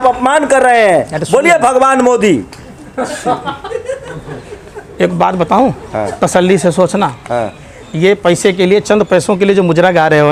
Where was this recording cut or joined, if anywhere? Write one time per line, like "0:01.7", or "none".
none